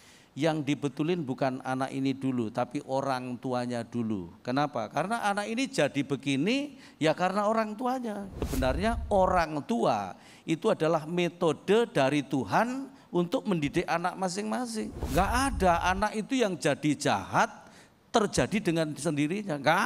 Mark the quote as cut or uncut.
cut